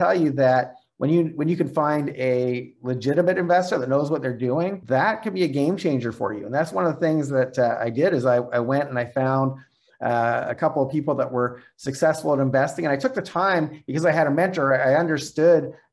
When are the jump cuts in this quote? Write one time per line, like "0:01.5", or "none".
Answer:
0:04.8